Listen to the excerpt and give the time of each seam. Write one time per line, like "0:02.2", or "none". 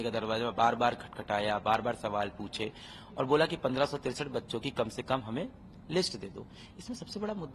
none